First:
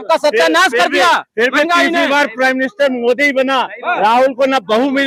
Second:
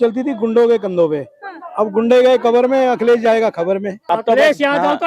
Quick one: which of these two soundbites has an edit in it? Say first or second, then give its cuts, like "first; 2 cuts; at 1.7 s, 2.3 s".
second; 1 cut; at 3.9 s